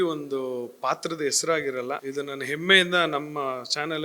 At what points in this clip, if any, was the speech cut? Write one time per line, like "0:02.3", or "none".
0:02.0